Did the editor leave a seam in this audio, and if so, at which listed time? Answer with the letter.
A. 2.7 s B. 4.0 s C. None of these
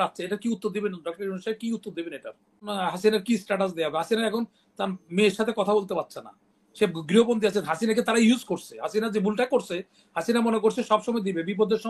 A